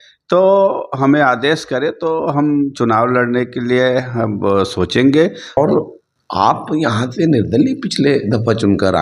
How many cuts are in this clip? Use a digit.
1